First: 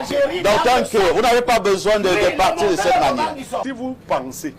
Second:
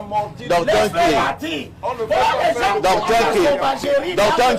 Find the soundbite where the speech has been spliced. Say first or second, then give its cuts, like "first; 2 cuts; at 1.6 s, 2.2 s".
first; 1 cut; at 3.6 s